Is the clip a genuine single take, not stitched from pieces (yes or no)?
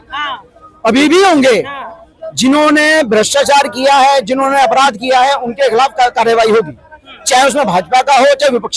yes